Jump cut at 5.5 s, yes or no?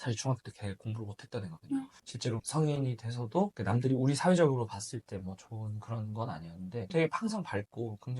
no